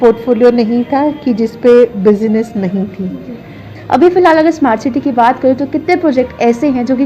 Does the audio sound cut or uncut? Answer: cut